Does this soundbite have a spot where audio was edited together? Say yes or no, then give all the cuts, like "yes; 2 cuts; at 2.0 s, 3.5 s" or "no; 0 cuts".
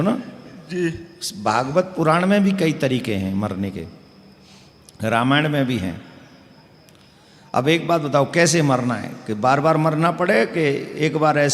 no; 0 cuts